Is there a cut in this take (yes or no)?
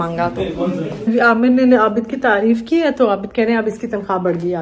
yes